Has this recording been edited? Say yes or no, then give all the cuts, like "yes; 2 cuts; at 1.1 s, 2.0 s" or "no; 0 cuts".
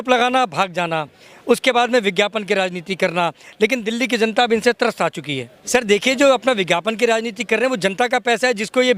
no; 0 cuts